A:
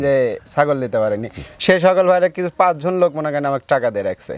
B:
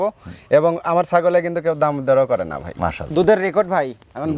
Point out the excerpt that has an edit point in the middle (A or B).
B